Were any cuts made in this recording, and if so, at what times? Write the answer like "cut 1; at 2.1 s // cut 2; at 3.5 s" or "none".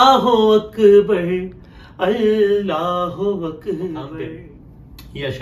cut 1; at 4.1 s